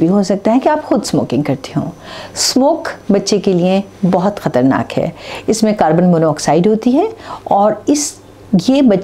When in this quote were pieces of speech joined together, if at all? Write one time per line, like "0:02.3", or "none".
none